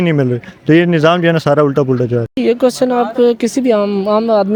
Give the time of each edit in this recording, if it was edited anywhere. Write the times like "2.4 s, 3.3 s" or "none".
none